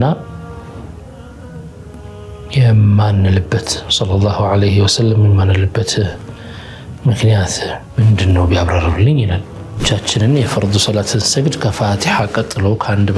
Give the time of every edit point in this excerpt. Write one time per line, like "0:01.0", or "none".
0:09.8